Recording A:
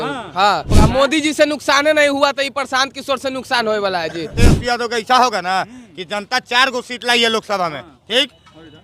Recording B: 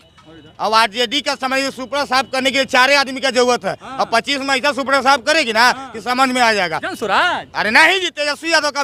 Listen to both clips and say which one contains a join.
A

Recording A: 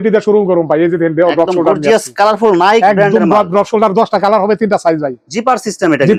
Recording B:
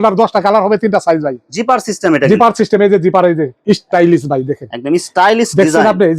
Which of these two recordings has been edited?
B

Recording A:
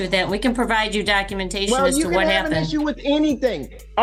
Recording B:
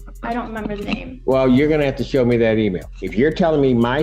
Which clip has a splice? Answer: B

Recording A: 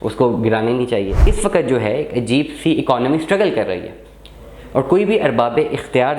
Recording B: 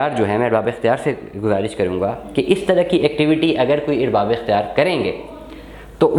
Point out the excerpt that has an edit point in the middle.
A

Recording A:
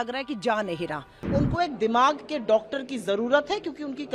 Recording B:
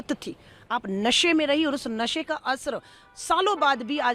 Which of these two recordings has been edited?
A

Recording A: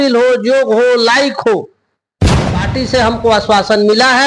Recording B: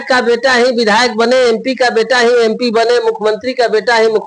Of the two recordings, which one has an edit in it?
A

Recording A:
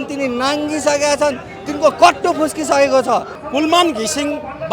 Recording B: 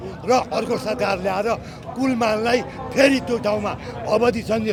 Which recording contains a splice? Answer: A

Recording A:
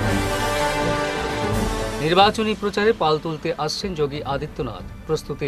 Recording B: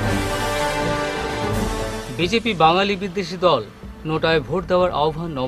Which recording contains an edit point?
A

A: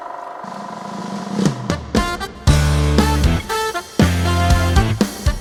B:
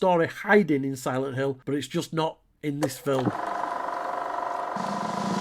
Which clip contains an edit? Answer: B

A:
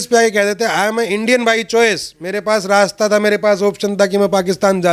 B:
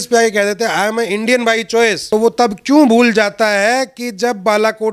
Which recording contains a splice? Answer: B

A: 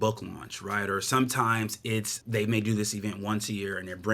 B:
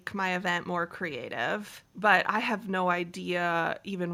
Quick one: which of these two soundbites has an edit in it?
A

